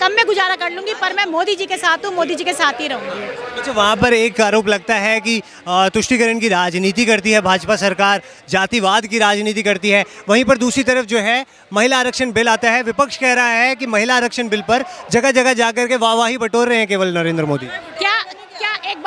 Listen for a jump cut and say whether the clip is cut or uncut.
uncut